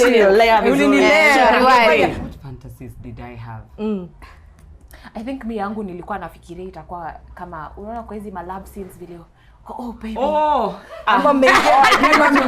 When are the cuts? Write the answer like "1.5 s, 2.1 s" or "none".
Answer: 2.2 s